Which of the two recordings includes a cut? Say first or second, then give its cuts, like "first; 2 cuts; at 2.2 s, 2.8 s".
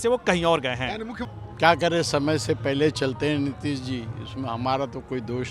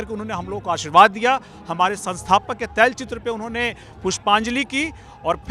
first; 1 cut; at 1.1 s